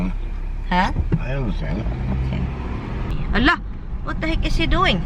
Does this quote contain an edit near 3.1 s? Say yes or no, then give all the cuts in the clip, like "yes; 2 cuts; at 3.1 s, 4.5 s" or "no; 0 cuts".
yes; 1 cut; at 3.1 s